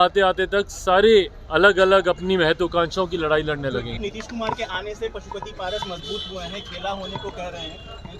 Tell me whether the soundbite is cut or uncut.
cut